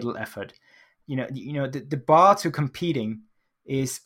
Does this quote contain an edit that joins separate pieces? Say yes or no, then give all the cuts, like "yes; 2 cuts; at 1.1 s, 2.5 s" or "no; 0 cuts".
yes; 1 cut; at 0.9 s